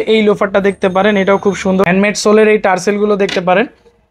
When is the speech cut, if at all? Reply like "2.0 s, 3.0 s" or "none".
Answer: 1.9 s